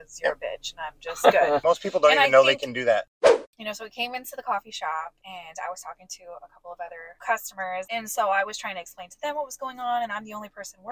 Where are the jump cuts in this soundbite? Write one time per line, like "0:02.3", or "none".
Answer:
0:01.6
0:03.2
0:05.2
0:07.1
0:07.9